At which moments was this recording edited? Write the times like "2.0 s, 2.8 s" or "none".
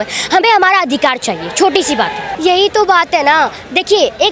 2.3 s